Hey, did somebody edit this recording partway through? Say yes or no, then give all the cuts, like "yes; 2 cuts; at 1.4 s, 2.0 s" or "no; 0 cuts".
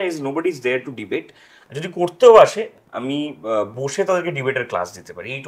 no; 0 cuts